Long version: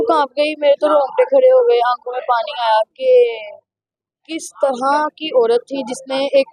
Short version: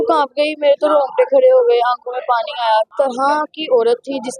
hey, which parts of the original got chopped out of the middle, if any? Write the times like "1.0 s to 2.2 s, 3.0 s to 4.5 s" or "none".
2.9 s to 4.5 s